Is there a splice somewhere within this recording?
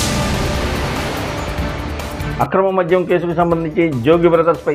yes; 1 cut; at 2.2 s

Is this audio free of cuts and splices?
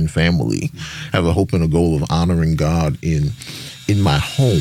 yes; 0 cuts

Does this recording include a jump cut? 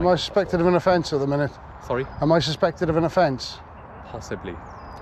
no; 0 cuts

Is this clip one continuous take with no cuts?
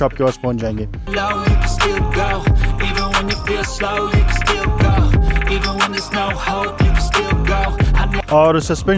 no; 1 cut; at 1.1 s

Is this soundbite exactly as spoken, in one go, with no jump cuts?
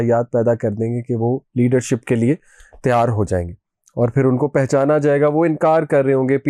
yes; 0 cuts

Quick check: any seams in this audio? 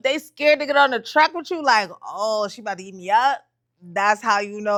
no; 0 cuts

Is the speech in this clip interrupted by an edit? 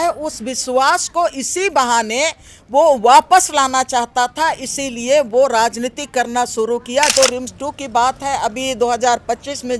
yes; 1 cut; at 7.1 s

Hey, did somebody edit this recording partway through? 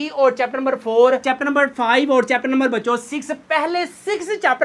no; 0 cuts

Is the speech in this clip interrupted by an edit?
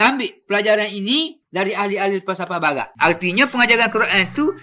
yes; 1 cut; at 2.9 s

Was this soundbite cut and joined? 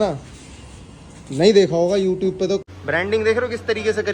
yes; 1 cut; at 2.7 s

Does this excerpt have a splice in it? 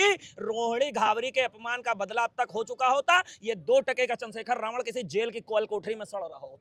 no; 0 cuts

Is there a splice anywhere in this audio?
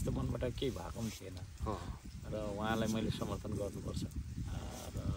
no; 0 cuts

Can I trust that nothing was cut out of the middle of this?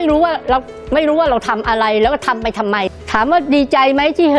no; 1 cut; at 2.9 s

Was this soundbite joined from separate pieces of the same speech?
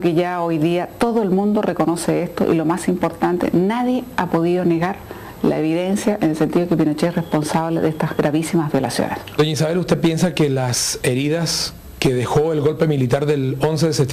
no; 0 cuts

